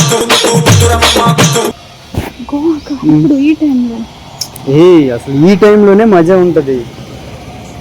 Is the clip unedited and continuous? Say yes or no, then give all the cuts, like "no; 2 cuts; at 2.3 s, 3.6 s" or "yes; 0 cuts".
no; 1 cut; at 1.7 s